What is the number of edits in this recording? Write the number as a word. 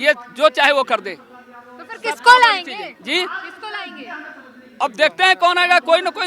zero